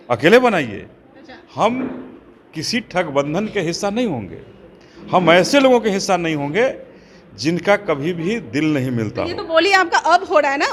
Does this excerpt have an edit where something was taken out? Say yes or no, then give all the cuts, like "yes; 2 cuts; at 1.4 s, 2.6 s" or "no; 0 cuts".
no; 0 cuts